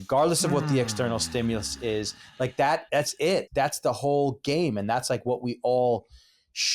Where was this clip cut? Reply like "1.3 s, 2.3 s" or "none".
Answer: 3.5 s